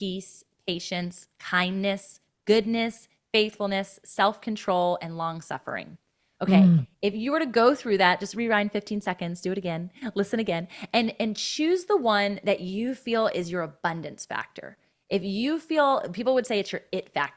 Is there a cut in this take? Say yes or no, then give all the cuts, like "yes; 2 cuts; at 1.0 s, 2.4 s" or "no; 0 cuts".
no; 0 cuts